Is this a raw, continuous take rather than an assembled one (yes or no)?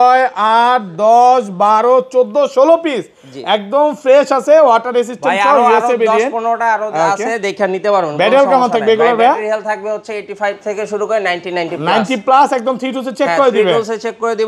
yes